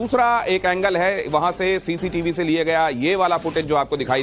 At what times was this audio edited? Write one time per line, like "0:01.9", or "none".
0:02.1